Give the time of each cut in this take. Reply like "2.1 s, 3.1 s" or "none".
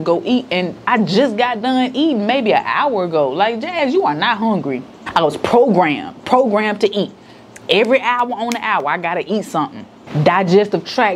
none